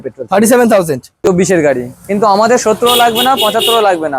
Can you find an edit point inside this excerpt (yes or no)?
yes